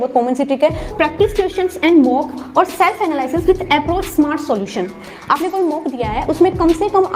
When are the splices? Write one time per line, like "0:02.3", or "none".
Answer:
0:00.9
0:05.0